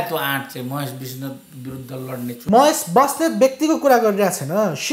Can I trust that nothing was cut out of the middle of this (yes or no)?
no